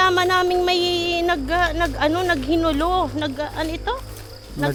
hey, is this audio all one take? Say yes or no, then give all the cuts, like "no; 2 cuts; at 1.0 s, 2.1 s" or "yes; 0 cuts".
yes; 0 cuts